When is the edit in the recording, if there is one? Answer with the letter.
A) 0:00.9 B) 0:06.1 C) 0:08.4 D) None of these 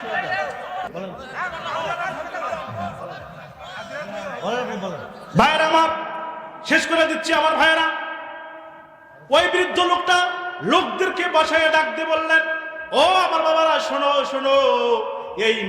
A